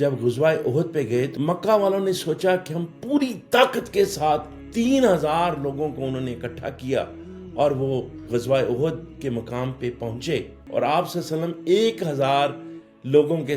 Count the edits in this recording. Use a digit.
2